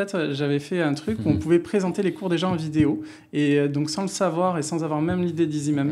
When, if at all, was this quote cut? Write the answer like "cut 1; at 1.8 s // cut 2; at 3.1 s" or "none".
none